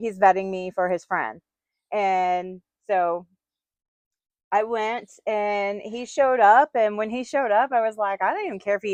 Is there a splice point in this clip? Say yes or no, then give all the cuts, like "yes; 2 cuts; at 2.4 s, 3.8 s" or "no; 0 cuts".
no; 0 cuts